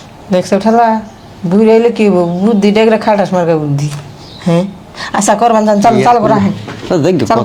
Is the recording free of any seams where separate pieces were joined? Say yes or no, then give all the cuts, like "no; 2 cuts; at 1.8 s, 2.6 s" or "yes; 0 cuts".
yes; 0 cuts